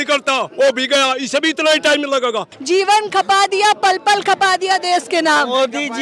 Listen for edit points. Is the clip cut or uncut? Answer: cut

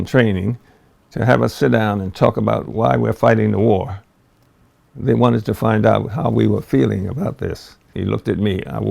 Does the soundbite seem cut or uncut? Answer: cut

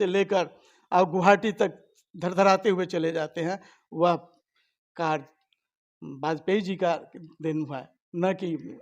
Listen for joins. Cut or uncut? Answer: uncut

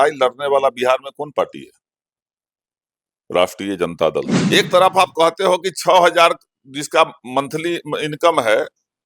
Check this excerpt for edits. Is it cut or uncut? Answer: cut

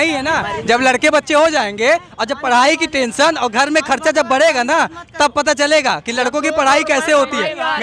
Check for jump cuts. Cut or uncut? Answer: uncut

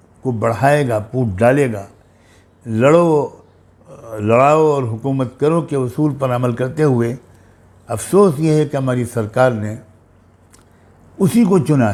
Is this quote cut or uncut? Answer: uncut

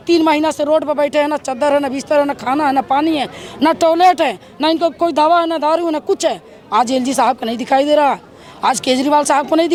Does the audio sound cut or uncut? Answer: uncut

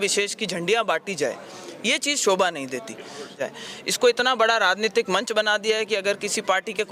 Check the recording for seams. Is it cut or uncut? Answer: cut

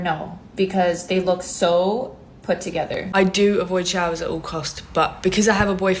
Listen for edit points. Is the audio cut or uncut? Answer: cut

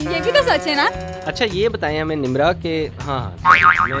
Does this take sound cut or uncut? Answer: cut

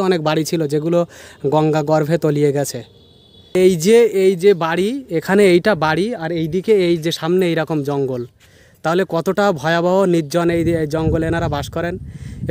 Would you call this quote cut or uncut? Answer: cut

